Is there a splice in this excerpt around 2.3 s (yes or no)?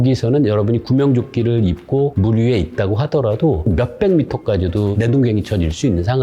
no